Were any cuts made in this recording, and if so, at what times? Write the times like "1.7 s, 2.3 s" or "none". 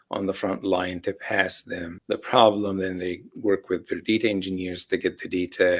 1.9 s